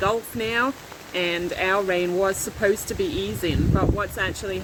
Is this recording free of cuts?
yes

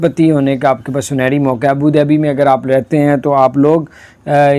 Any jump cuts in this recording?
no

